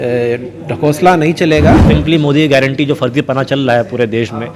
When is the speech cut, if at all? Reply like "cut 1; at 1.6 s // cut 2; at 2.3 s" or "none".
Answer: cut 1; at 1.8 s